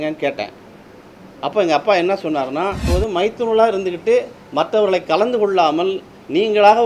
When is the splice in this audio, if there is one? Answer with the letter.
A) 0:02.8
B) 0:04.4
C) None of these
A